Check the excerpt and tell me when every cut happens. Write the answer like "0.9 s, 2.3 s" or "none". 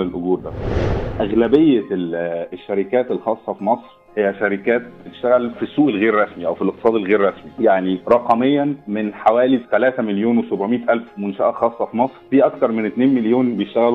0.9 s, 5.6 s, 7.8 s, 8.9 s, 12.2 s